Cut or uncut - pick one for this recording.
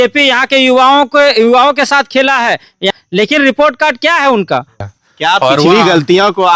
cut